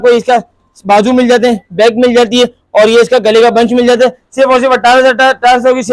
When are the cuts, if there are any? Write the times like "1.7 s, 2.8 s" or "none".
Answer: none